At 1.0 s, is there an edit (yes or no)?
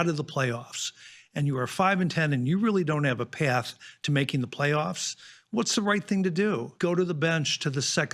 no